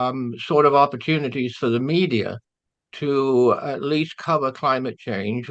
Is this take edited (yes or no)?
no